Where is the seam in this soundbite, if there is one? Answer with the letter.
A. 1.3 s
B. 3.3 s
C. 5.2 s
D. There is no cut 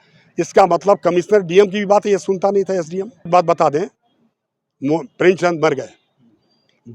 B